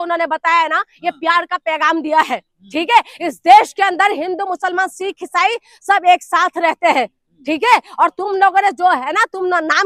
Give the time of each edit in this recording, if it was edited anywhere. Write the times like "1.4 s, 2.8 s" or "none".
none